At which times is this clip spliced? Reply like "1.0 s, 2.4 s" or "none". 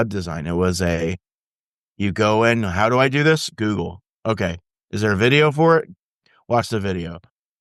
none